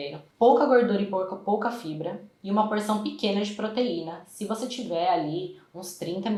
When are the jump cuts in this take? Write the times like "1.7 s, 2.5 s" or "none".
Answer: none